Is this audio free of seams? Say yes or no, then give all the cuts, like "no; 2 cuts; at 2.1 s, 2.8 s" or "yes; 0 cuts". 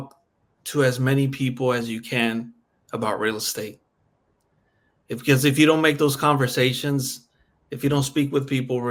yes; 0 cuts